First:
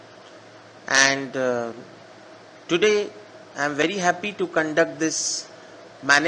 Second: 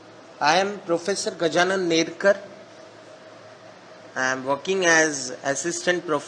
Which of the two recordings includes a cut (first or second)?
first